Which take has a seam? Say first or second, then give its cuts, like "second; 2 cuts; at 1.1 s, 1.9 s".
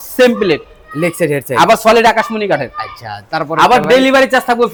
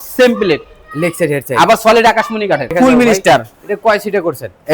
second; 1 cut; at 2.7 s